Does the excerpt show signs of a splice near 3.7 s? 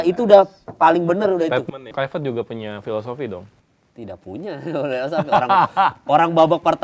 no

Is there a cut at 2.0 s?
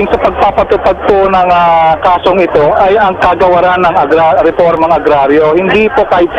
yes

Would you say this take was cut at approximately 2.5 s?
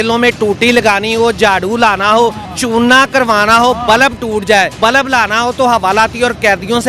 yes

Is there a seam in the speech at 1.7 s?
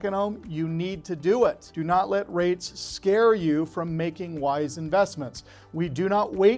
yes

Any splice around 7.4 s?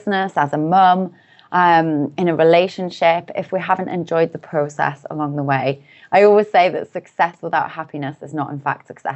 yes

